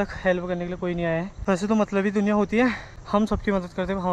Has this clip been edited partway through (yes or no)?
yes